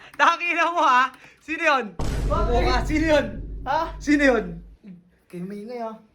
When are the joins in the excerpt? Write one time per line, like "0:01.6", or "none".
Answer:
0:02.1

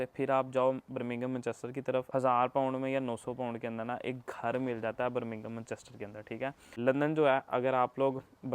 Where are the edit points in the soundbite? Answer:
0:02.1
0:06.6

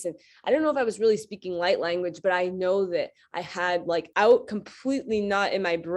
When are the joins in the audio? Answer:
0:04.1

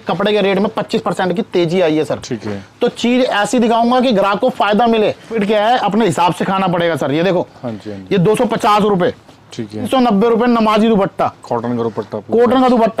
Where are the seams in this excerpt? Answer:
0:05.3
0:09.9

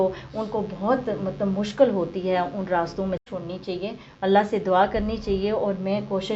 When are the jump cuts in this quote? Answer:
0:03.3

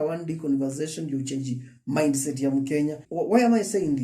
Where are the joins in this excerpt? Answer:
0:03.0

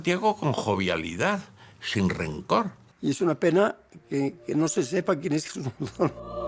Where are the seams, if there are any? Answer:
0:02.8

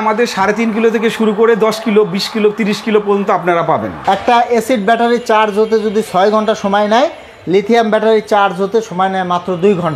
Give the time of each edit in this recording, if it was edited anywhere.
0:04.0

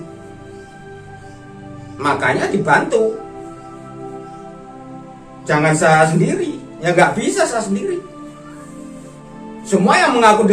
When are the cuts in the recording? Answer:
0:03.8
0:05.5
0:08.2
0:09.7

